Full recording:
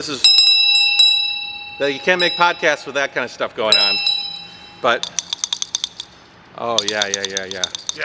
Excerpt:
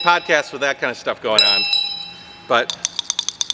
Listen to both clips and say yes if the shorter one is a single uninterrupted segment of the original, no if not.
yes